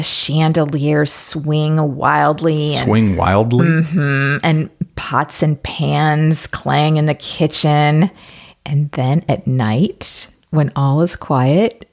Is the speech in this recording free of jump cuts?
yes; 0 cuts

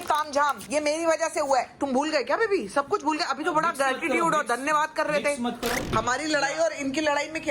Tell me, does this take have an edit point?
yes; 1 cut; at 5.9 s

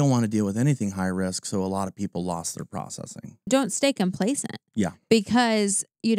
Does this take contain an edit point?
yes; 1 cut; at 3.5 s

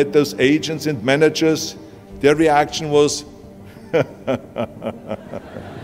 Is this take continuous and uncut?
yes; 0 cuts

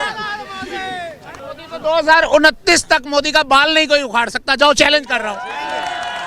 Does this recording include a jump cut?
yes; 1 cut; at 1.4 s

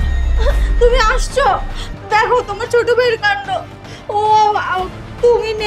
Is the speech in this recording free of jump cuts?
yes; 0 cuts

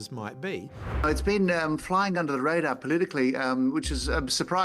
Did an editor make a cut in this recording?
yes; 1 cut; at 1.0 s

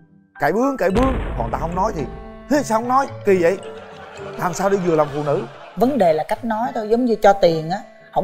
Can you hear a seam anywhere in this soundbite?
no; 0 cuts

